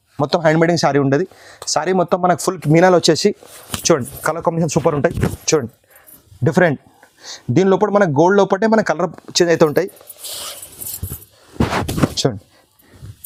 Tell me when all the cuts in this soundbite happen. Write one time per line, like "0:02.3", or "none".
none